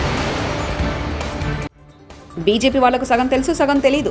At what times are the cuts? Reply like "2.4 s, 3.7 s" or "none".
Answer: 1.4 s